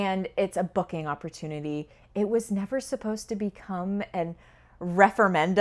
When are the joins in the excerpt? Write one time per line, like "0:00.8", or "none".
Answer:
none